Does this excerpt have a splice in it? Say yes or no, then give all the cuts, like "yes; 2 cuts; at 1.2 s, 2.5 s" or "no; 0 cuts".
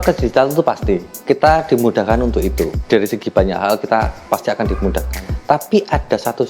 no; 0 cuts